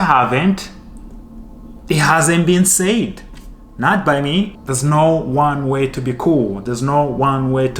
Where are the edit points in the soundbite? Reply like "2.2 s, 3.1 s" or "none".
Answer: 4.6 s